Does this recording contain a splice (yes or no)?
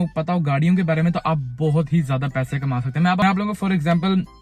no